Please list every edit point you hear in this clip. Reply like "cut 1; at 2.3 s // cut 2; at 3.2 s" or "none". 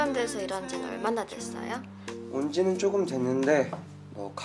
none